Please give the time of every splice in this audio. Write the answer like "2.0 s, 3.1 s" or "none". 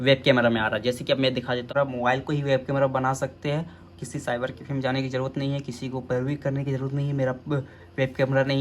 1.7 s